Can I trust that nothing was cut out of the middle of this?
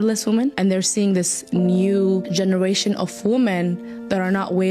yes; 0 cuts

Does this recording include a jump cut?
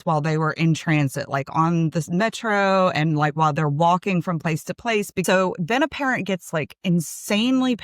yes; 1 cut; at 5.2 s

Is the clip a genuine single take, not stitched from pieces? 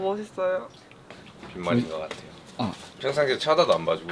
no; 1 cut; at 2.9 s

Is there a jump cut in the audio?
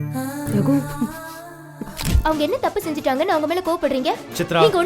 yes; 1 cut; at 2.0 s

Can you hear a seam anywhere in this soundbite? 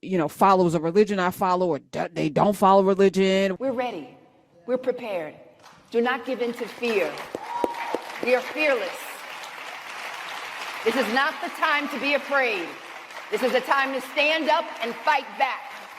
yes; 1 cut; at 3.5 s

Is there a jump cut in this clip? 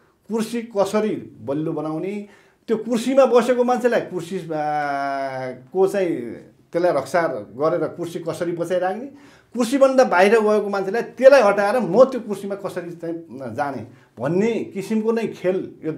no; 0 cuts

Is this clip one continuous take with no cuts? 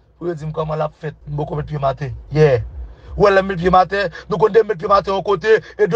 no; 2 cuts; at 1.2 s, 2.1 s

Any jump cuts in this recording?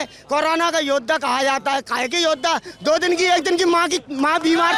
no; 0 cuts

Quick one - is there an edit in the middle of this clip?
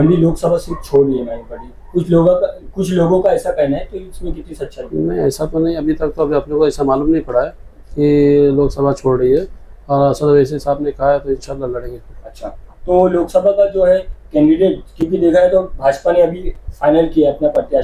no; 0 cuts

